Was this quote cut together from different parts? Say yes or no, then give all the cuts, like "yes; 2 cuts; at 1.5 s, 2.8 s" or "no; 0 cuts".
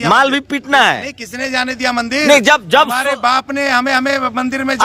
no; 0 cuts